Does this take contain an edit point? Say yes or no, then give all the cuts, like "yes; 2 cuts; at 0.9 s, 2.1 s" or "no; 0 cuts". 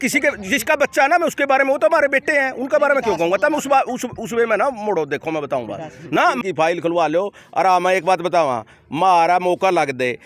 yes; 1 cut; at 6.4 s